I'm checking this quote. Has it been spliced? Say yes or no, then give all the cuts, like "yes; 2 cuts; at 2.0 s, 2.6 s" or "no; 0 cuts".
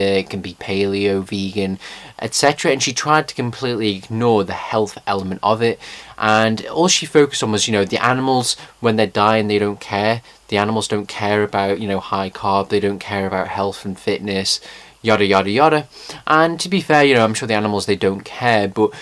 yes; 1 cut; at 15.0 s